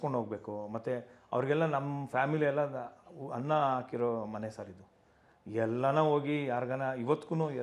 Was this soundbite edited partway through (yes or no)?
no